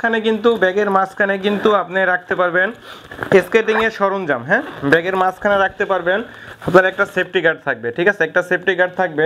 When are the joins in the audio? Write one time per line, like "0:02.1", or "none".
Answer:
none